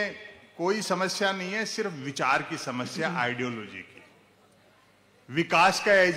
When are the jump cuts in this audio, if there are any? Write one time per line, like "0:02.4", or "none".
none